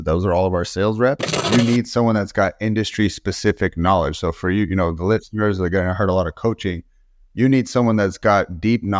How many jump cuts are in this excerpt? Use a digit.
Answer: 1